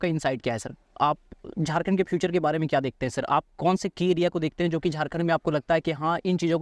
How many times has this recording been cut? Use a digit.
0